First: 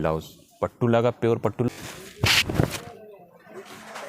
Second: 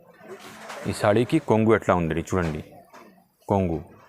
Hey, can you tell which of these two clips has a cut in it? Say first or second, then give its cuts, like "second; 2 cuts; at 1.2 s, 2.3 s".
first; 1 cut; at 1.7 s